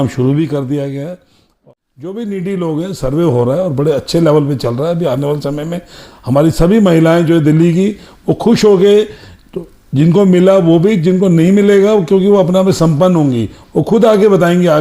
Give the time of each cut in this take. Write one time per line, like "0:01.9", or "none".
0:01.5